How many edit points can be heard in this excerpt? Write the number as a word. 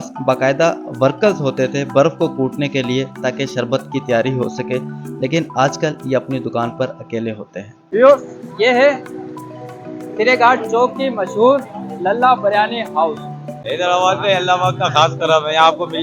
two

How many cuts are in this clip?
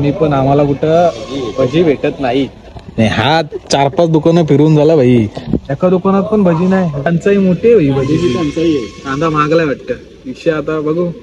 zero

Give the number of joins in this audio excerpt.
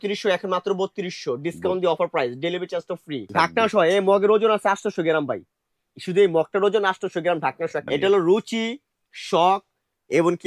two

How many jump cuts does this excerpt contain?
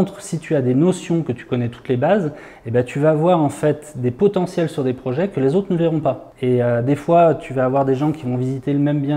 one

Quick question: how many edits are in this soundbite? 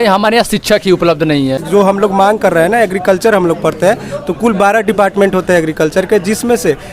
one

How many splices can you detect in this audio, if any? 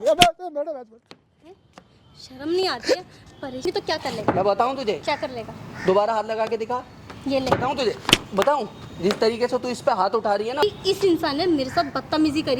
two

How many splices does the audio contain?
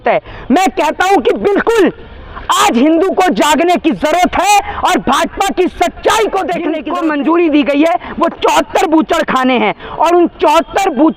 one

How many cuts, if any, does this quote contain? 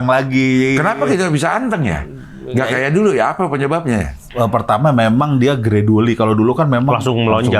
one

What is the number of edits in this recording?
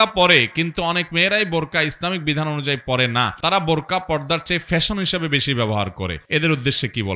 two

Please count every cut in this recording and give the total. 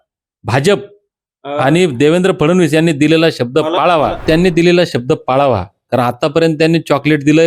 one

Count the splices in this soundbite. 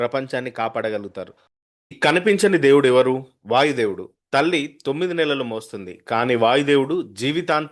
one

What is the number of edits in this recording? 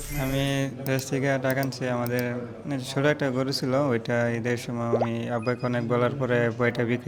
zero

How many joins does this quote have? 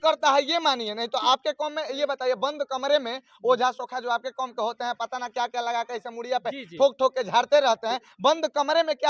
zero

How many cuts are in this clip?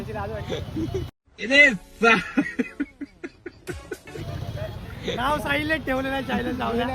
zero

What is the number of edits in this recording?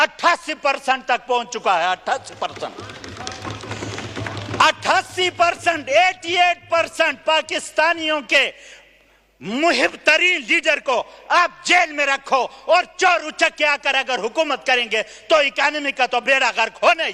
zero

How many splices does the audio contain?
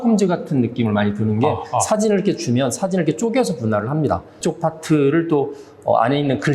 one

